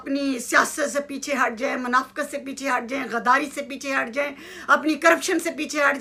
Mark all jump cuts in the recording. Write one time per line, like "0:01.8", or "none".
none